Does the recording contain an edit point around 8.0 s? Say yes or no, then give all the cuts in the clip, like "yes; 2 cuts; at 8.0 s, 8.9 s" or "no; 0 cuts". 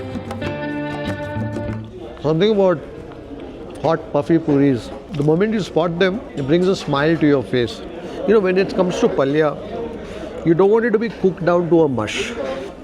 yes; 2 cuts; at 1.9 s, 8.0 s